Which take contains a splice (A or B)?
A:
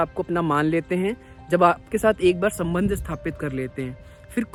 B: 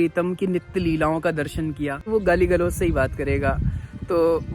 B